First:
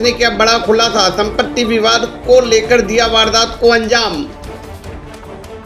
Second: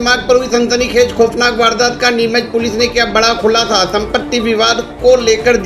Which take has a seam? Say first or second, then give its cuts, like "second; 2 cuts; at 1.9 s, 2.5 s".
first; 1 cut; at 4.3 s